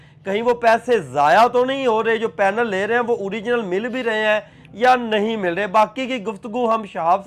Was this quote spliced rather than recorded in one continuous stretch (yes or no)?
no